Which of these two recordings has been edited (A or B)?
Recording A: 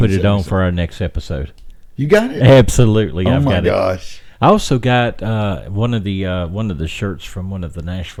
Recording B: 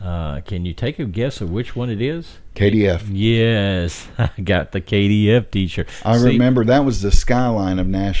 B